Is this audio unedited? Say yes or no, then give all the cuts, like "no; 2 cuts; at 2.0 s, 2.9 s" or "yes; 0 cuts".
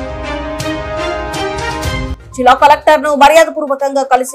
no; 1 cut; at 2.1 s